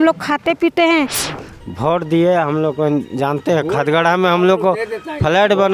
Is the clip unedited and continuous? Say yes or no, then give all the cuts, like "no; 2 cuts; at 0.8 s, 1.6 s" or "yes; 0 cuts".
no; 1 cut; at 1.2 s